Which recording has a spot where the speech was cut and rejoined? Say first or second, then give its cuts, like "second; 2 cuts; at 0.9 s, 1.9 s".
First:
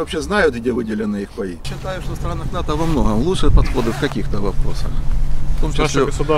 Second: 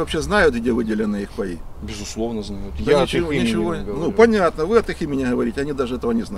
first; 1 cut; at 1.7 s